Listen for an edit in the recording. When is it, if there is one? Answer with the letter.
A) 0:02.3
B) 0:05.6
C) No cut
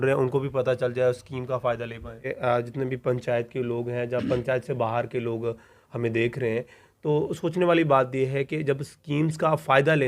A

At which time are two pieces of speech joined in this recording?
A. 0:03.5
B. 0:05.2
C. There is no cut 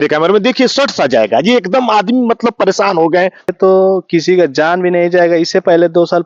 A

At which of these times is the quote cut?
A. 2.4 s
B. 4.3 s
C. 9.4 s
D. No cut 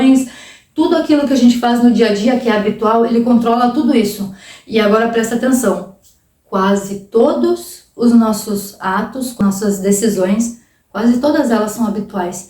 C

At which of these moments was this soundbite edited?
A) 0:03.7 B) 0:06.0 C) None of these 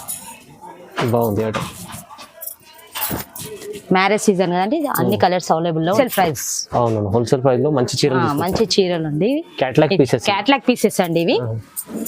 B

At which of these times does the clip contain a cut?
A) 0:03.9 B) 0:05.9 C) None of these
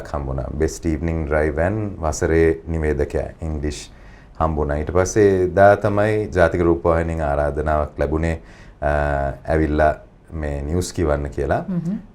C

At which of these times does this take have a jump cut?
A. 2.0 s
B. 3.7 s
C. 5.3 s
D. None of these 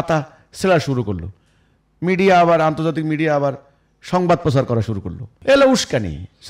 C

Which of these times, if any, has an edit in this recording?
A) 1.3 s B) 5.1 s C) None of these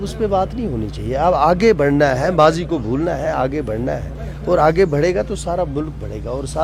C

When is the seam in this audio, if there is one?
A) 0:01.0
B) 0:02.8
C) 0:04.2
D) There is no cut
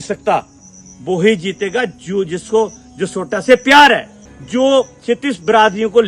C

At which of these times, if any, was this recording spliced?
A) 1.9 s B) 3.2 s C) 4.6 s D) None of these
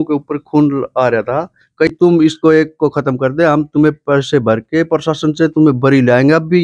A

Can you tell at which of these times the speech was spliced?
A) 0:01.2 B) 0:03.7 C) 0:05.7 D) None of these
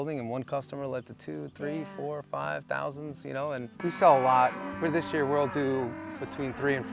B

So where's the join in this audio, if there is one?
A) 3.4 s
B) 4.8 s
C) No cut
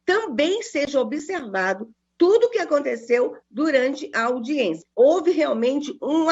B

